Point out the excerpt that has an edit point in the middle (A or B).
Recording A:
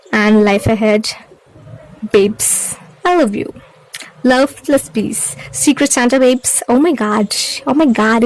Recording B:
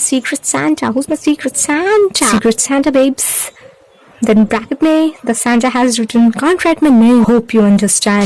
B